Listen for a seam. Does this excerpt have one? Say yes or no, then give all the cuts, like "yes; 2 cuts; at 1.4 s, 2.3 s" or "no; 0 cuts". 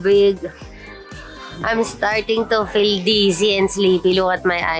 no; 0 cuts